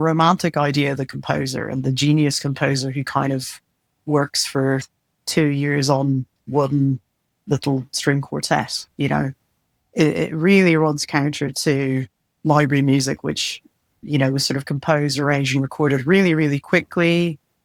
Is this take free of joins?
yes; 0 cuts

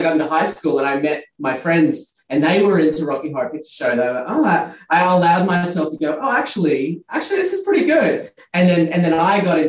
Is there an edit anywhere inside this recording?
no; 0 cuts

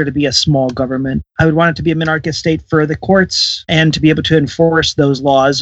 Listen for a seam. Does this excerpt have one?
yes; 2 cuts; at 1.3 s, 3.7 s

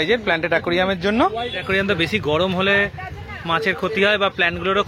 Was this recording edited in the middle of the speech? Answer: yes; 1 cut; at 1.6 s

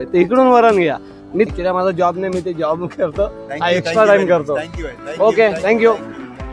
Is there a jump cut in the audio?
yes; 1 cut; at 1.5 s

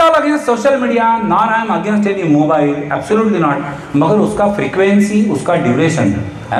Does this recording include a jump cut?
no; 0 cuts

